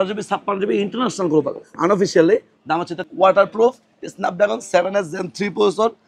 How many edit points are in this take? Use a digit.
1